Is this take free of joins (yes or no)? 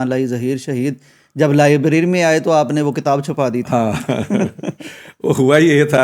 yes